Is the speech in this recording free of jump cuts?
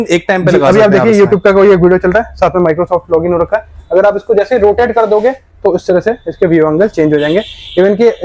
yes; 0 cuts

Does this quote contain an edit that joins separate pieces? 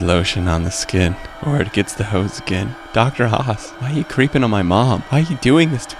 yes; 4 cuts; at 1.3 s, 2.8 s, 3.7 s, 5.0 s

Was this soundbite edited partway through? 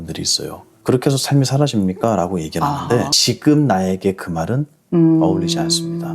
yes; 1 cut; at 3.1 s

